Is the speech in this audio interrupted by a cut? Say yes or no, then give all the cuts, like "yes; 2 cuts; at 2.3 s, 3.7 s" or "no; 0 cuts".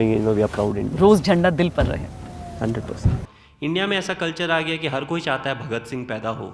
yes; 1 cut; at 3.3 s